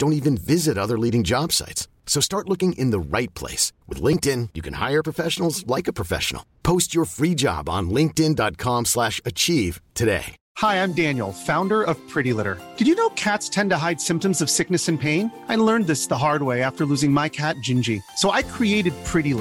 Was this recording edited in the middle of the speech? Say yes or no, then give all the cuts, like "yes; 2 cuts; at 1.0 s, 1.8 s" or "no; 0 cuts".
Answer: yes; 1 cut; at 10.4 s